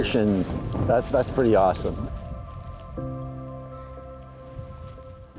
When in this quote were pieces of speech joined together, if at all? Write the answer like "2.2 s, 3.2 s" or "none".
none